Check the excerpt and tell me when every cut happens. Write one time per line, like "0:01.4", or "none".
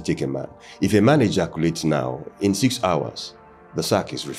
none